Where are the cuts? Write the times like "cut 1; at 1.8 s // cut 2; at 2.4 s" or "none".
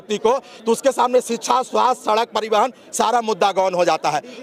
none

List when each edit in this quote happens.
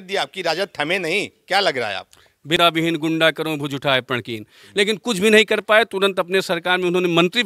cut 1; at 2.6 s

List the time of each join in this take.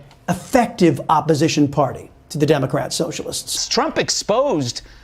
cut 1; at 3.6 s

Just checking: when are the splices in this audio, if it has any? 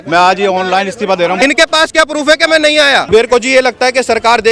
cut 1; at 1.4 s // cut 2; at 3.1 s

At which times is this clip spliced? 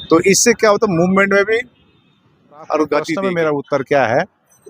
cut 1; at 3.2 s

